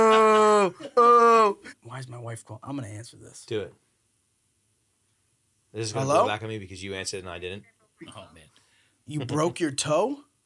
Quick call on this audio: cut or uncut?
cut